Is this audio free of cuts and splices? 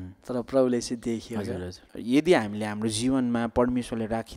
no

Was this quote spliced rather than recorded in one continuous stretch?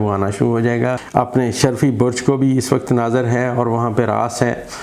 yes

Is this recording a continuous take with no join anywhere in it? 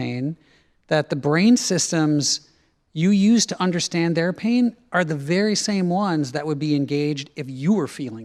yes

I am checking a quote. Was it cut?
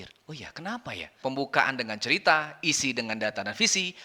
yes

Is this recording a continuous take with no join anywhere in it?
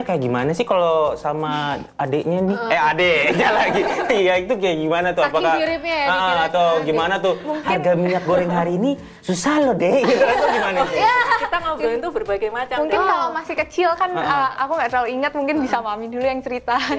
yes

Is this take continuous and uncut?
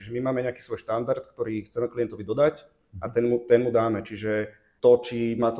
yes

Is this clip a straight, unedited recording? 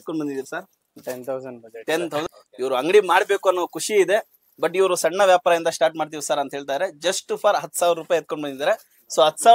no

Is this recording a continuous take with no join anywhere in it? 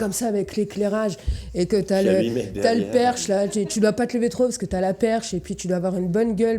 yes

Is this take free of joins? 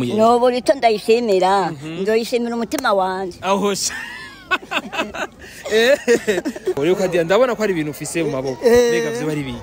no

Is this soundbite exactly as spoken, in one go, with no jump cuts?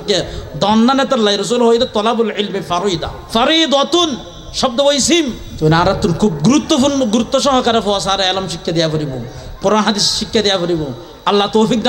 no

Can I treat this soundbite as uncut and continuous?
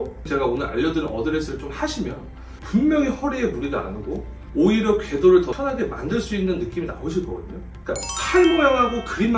yes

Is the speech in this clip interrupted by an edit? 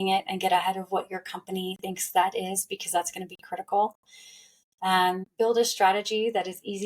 yes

